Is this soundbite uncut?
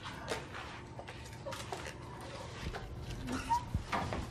no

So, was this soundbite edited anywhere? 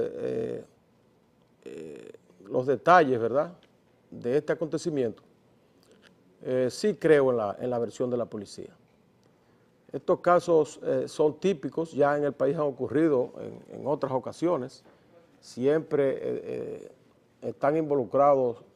no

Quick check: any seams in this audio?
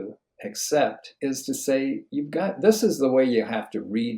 yes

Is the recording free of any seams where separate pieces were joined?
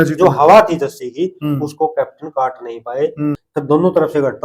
no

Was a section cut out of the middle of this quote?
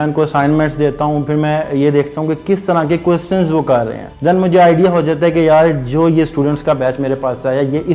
yes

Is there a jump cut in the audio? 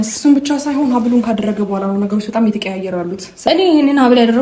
yes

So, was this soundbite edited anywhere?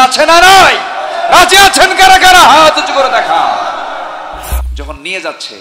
yes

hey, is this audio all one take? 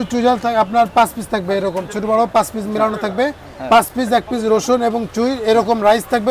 yes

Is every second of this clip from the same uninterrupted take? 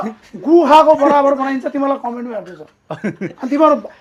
yes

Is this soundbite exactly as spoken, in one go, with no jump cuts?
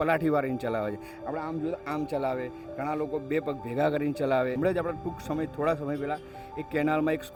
yes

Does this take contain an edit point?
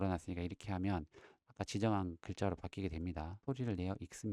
yes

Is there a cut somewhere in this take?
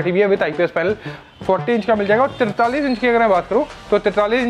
yes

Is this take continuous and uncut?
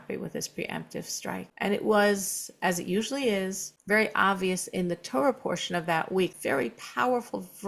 no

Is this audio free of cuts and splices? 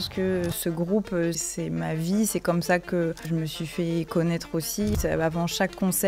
no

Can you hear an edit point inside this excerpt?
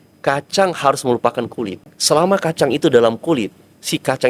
yes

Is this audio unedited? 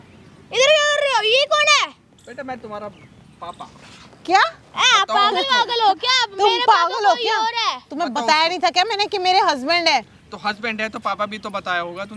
yes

